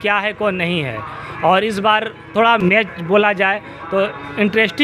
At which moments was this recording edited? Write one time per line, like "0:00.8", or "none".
0:02.6

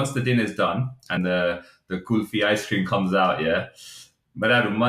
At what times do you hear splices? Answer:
0:01.2

